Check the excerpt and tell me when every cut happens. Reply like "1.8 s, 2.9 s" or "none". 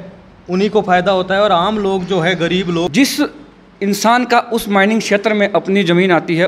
2.9 s